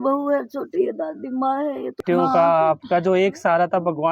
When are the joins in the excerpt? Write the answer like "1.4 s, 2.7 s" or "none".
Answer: 2.0 s